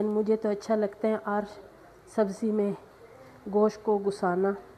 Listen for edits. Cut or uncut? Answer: uncut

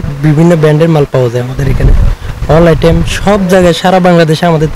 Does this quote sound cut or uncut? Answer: uncut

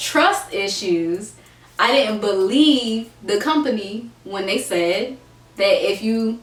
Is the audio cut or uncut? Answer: uncut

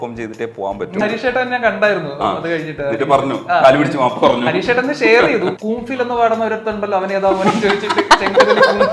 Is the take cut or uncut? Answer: cut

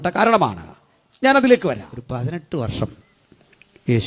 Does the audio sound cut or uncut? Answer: cut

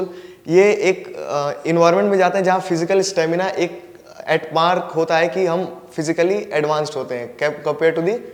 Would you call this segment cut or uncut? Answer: uncut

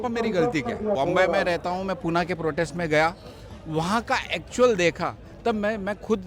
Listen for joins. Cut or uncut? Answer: cut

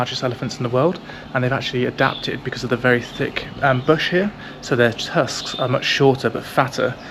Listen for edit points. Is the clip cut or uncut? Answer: uncut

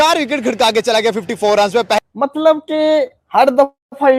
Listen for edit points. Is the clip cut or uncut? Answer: cut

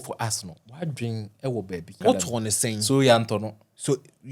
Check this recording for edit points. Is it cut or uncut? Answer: cut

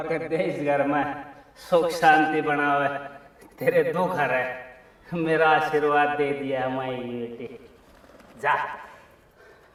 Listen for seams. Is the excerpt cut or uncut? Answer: uncut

